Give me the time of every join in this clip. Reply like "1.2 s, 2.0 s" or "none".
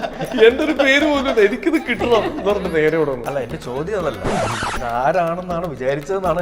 none